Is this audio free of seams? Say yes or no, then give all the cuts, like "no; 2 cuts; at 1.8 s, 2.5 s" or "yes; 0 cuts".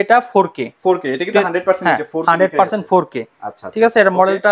yes; 0 cuts